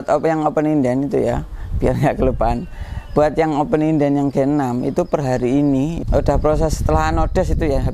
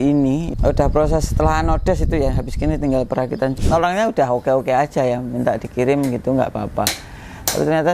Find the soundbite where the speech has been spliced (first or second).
second